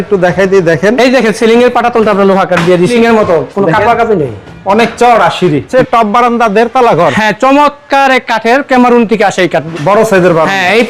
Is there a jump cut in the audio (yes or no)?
yes